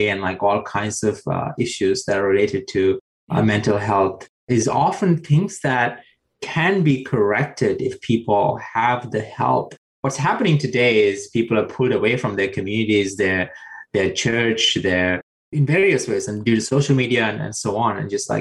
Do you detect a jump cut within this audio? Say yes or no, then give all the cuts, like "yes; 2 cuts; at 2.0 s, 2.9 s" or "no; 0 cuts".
yes; 1 cut; at 4.6 s